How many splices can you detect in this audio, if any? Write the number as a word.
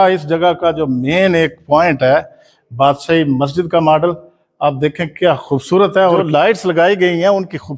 one